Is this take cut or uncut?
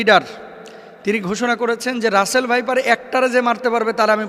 uncut